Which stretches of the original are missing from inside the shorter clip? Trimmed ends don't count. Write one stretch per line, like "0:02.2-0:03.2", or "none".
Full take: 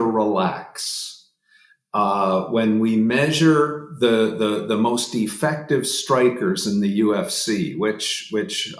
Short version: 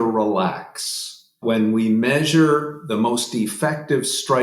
0:01.4-0:02.5
0:03.9-0:04.6